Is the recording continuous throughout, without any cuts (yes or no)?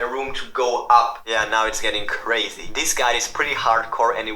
no